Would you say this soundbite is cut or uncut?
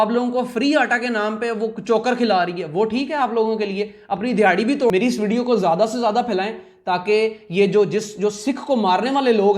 cut